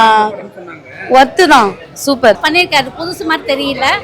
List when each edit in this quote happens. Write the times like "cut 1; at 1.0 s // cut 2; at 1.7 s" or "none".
cut 1; at 2.4 s